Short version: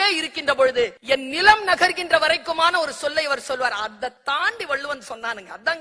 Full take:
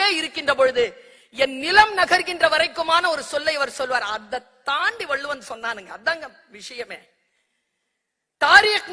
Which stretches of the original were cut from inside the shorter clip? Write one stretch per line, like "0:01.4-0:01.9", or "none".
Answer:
0:01.0-0:01.3
0:04.5-0:04.6